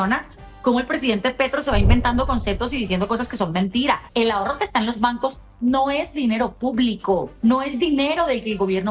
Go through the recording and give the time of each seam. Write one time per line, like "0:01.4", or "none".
0:04.0
0:07.3